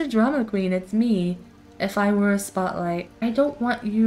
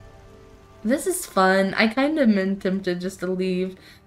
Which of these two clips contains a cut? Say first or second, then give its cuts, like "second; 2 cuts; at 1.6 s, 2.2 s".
first; 1 cut; at 3.1 s